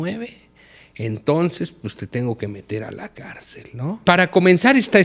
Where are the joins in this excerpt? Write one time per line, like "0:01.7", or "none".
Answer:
0:04.0